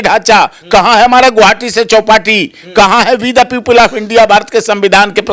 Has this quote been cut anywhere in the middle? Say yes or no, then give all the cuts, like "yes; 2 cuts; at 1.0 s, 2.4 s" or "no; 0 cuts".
no; 0 cuts